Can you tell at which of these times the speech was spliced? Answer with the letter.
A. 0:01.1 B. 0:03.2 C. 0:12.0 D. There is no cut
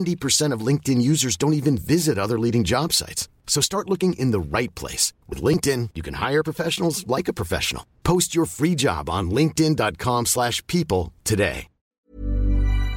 C